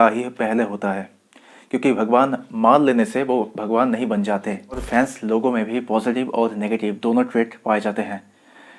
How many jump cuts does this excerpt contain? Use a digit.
1